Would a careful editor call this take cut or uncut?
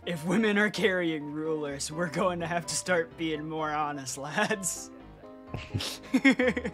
uncut